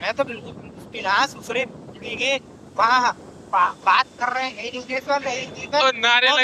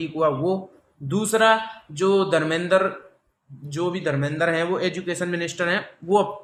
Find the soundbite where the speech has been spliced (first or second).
first